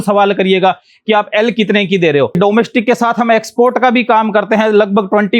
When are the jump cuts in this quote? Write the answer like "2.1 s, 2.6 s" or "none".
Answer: 2.4 s